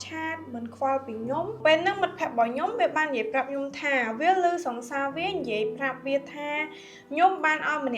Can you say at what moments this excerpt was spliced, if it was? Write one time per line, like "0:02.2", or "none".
0:01.6